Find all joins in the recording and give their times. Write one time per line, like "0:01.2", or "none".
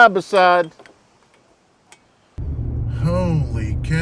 0:02.4